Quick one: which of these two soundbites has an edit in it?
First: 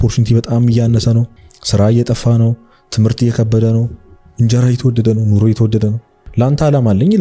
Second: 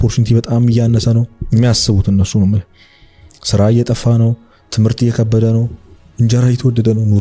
first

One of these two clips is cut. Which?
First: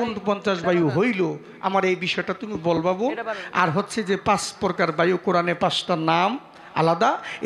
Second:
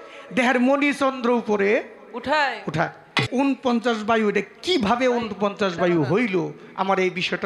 second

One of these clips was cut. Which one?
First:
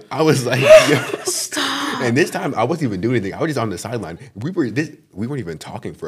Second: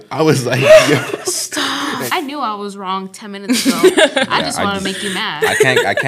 second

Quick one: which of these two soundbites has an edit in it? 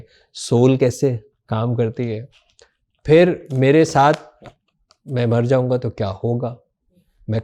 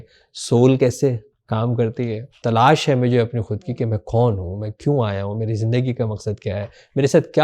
second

